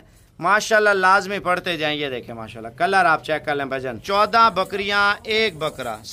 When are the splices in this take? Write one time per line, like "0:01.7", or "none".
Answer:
0:04.0

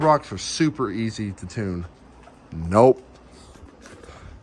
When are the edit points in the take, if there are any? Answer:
none

